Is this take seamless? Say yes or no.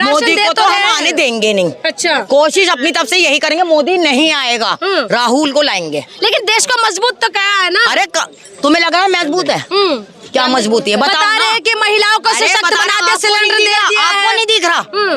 yes